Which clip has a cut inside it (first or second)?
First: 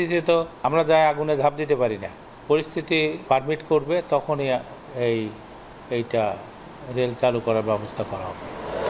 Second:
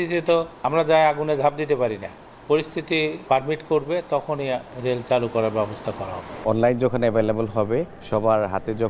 second